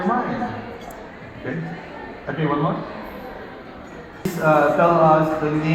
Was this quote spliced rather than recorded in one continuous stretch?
yes; 1 cut; at 4.3 s

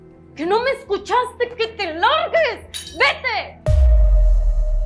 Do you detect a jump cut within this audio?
yes; 1 cut; at 3.5 s

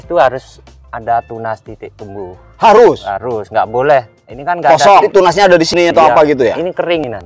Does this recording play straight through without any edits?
no; 1 cut; at 5.1 s

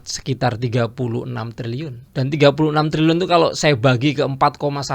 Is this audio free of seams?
no; 1 cut; at 2.0 s

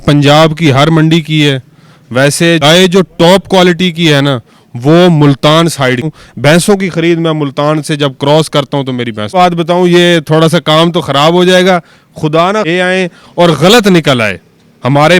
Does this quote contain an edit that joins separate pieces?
yes; 4 cuts; at 2.6 s, 6.1 s, 9.3 s, 12.7 s

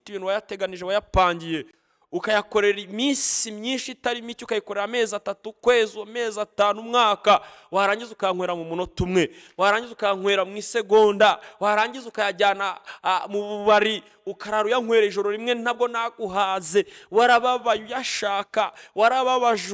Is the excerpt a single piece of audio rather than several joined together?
yes; 0 cuts

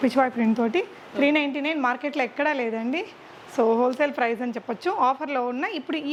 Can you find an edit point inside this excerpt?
no; 0 cuts

